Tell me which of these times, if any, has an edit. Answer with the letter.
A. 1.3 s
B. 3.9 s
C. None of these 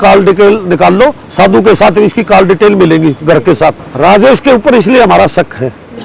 B